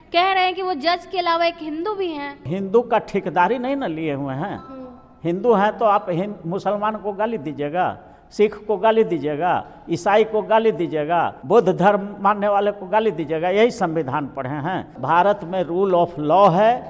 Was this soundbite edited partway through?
yes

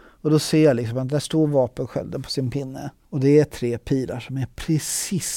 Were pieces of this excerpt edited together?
no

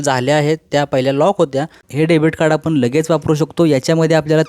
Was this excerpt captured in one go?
no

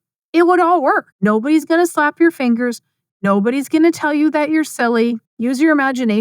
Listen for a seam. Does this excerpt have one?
yes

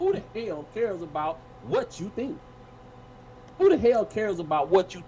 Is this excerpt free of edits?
no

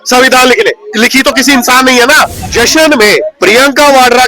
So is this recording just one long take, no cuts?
no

